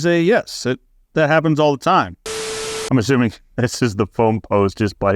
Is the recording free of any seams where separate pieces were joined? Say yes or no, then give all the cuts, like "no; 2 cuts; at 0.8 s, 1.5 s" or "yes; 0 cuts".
no; 1 cut; at 2.2 s